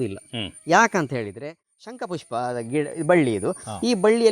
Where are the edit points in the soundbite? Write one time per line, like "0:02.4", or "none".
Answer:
0:01.3